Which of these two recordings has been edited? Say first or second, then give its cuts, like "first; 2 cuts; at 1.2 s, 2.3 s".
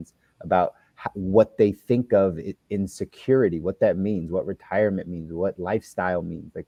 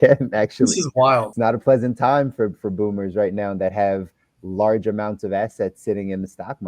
second; 1 cut; at 1.3 s